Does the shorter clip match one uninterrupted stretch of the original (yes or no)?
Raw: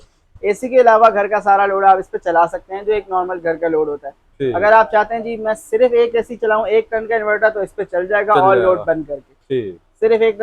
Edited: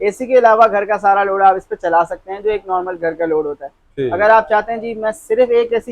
yes